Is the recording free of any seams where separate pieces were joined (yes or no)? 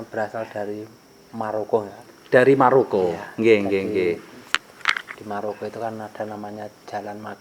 yes